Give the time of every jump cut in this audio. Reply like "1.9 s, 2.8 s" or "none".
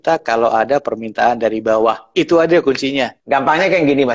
3.2 s

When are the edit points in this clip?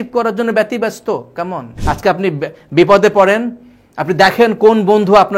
1.7 s

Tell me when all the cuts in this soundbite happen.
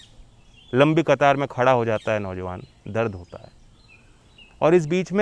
none

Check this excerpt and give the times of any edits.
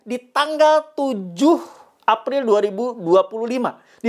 none

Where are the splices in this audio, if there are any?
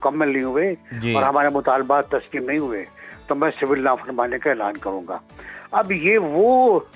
none

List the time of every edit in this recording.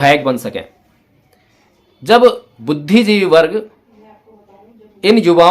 2.5 s

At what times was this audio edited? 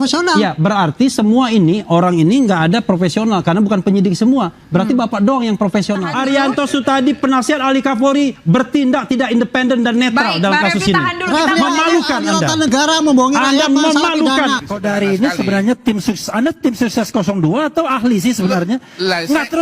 6.1 s, 14.7 s

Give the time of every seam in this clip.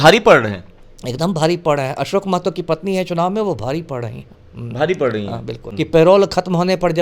5.6 s

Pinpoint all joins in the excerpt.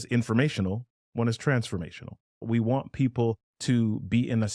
2.4 s, 3.5 s

